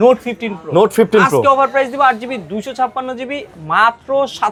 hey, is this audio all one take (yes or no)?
yes